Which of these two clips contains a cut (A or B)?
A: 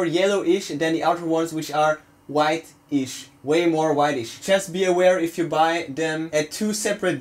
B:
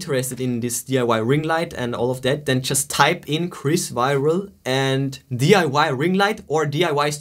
A